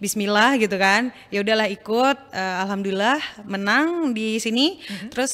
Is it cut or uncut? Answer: uncut